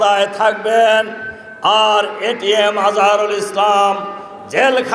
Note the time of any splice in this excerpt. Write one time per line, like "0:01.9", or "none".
none